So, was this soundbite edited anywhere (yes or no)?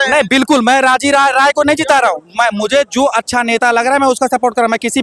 no